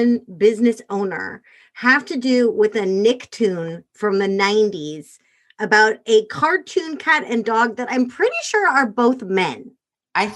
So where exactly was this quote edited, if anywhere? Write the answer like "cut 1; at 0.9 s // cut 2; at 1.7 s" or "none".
none